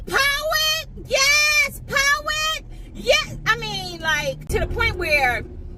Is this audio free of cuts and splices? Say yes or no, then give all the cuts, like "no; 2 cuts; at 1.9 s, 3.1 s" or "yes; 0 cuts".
no; 1 cut; at 4.5 s